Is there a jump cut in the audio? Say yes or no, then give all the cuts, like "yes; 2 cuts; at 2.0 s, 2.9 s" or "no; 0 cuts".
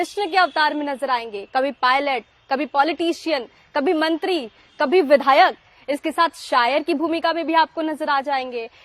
no; 0 cuts